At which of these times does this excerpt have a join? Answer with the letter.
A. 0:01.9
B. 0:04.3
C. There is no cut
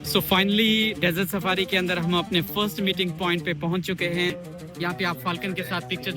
B